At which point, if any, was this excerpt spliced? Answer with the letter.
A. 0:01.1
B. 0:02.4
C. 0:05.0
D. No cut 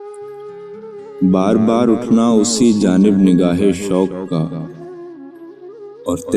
A